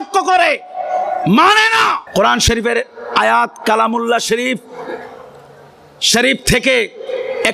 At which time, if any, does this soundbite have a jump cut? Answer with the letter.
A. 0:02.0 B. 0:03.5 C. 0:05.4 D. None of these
A